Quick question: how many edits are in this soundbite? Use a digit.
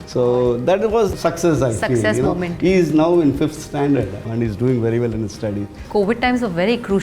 3